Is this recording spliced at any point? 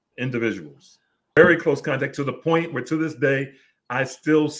yes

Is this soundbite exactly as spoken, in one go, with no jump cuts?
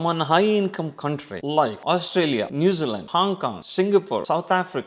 yes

